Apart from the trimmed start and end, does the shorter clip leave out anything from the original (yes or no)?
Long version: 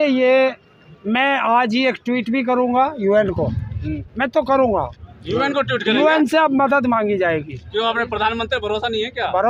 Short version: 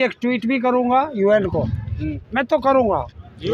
no